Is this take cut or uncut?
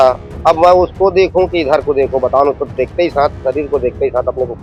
uncut